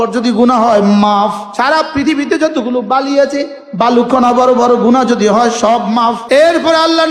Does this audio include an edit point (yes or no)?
yes